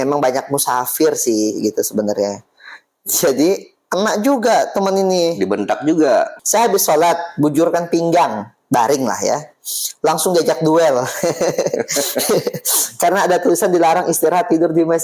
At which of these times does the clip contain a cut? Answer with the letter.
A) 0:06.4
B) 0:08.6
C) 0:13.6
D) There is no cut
A